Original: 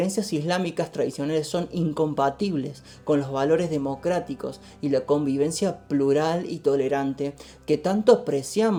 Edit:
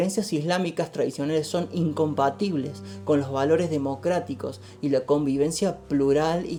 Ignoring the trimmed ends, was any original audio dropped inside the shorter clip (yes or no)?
no